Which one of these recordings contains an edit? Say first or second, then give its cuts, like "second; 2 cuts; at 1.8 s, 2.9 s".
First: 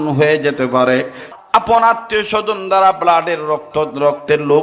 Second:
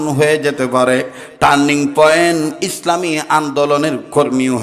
first; 1 cut; at 1.2 s